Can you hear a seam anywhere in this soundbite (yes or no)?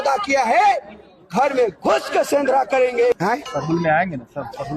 yes